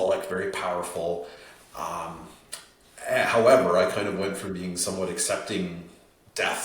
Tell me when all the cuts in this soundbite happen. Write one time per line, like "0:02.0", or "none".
none